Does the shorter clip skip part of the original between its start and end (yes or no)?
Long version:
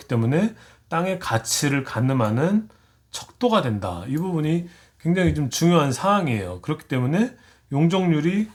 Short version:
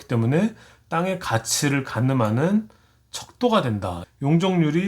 yes